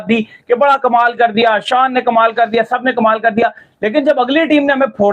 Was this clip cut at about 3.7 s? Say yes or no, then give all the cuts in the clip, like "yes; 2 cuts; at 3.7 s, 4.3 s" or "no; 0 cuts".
no; 0 cuts